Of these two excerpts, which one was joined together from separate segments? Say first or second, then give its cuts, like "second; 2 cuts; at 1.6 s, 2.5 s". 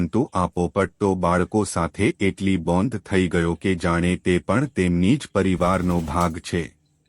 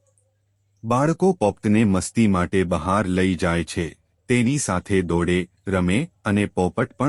first; 1 cut; at 5.9 s